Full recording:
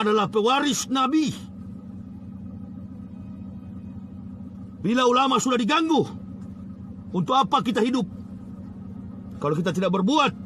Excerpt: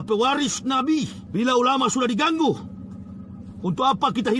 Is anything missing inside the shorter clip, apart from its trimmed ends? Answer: yes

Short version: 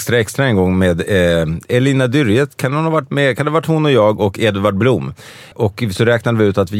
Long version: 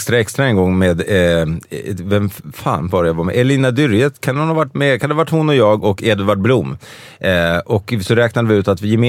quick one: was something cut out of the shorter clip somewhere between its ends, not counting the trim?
yes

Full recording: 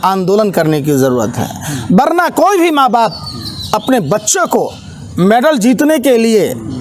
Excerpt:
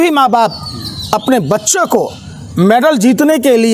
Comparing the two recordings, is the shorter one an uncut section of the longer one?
yes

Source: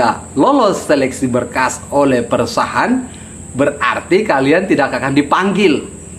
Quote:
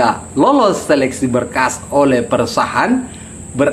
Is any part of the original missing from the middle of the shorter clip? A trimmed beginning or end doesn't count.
no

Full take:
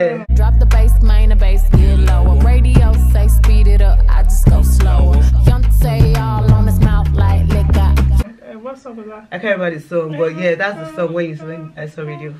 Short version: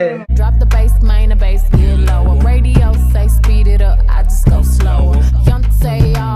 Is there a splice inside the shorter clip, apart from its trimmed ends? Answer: no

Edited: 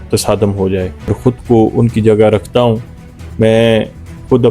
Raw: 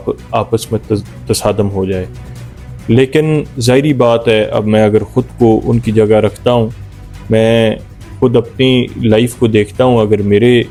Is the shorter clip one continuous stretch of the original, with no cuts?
no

